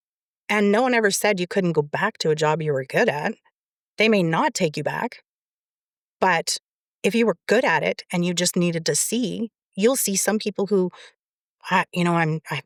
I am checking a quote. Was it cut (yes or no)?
no